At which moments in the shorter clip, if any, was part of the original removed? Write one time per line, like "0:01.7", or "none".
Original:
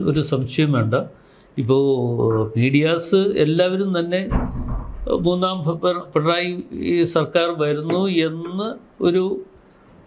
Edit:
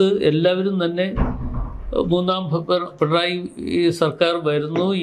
none